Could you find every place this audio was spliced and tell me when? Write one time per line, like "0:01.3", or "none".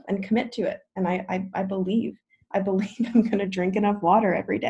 none